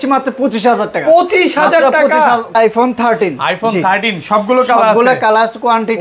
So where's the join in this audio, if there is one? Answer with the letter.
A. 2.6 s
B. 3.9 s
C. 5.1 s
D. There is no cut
A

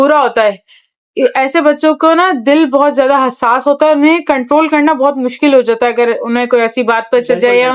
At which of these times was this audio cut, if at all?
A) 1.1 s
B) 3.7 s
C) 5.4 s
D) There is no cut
D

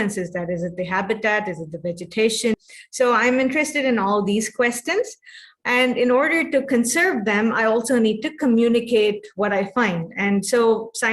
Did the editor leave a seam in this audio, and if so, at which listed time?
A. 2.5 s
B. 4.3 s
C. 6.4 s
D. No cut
A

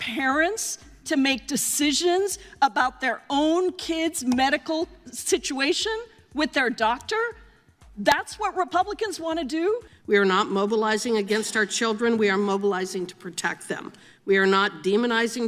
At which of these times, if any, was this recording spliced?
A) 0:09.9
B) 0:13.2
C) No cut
A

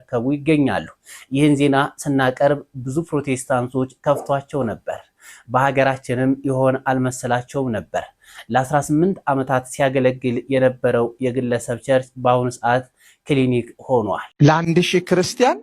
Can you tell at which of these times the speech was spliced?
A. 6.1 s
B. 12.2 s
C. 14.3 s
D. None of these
C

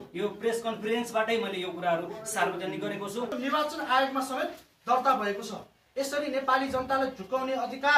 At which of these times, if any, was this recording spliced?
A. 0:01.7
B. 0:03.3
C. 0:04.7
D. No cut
B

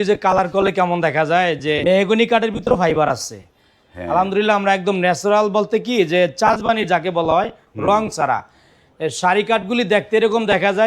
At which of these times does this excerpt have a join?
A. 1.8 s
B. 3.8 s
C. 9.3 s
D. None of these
A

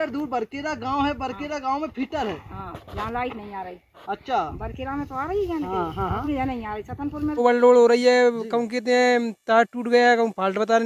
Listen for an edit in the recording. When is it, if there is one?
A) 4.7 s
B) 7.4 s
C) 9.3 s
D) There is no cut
B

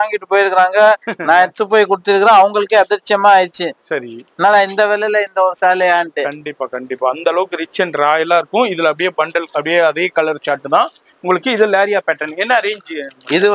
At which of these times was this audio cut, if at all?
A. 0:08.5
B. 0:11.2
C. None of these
C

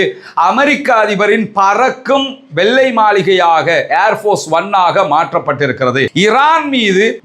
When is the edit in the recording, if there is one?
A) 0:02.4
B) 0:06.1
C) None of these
B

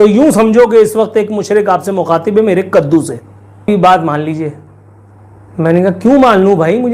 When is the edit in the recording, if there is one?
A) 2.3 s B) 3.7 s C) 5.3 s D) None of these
B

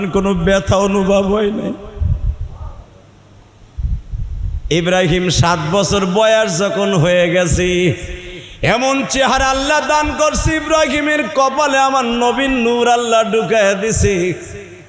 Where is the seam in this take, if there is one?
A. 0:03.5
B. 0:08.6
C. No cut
A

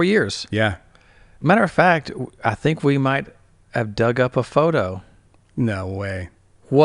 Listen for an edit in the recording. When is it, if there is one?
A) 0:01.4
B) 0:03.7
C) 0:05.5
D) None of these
A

